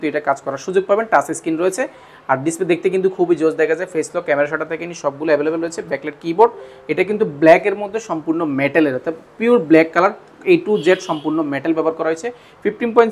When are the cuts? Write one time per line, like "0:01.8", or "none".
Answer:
none